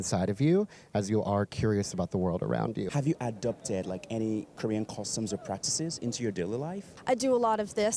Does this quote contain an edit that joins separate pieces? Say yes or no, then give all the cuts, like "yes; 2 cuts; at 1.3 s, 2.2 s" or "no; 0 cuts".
yes; 2 cuts; at 2.9 s, 6.9 s